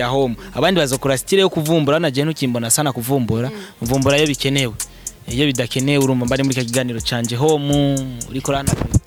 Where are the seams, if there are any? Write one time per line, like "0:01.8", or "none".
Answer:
none